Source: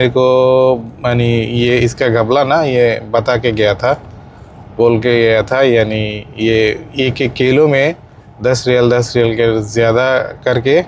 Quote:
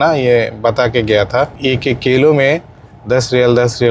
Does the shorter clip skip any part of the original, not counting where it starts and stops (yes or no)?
yes